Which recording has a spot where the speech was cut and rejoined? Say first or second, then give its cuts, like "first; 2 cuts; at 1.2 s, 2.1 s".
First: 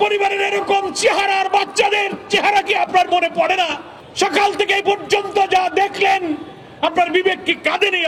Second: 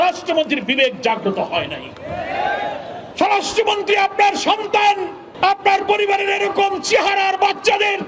second; 1 cut; at 3.0 s